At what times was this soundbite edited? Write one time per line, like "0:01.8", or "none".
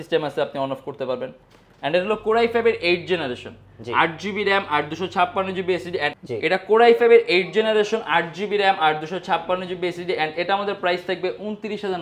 0:06.1